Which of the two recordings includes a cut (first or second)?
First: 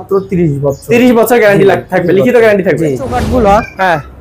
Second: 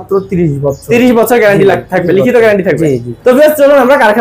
first